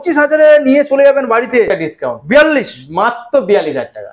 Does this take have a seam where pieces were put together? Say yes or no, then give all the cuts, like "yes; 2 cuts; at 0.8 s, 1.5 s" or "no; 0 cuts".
yes; 1 cut; at 1.7 s